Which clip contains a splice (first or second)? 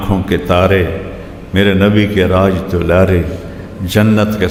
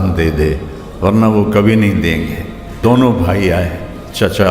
second